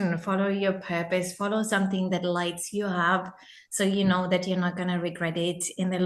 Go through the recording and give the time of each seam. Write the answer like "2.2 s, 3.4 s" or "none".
none